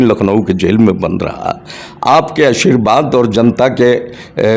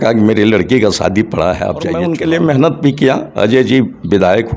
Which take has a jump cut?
second; 1 cut; at 2.0 s

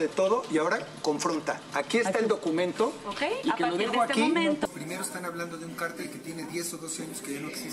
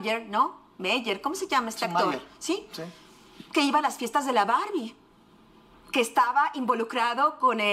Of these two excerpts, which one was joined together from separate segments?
first; 1 cut; at 4.7 s

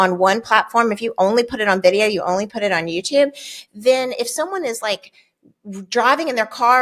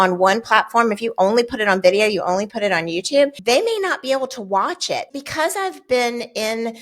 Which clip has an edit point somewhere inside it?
second; 2 cuts; at 3.4 s, 5.1 s

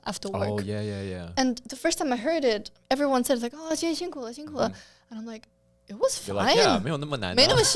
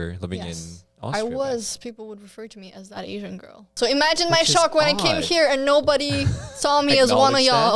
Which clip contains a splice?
second; 1 cut; at 3.6 s

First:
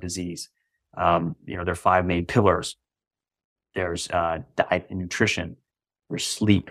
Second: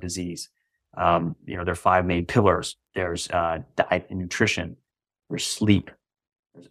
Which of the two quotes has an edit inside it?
second; 1 cut; at 2.8 s

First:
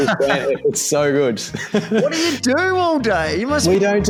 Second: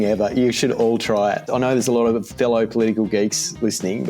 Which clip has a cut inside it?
second; 1 cut; at 1.5 s

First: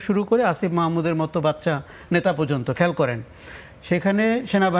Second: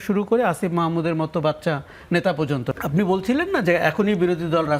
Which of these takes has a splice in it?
second; 1 cut; at 2.7 s

